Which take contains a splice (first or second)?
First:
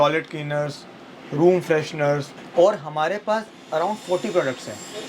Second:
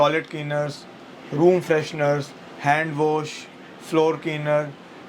first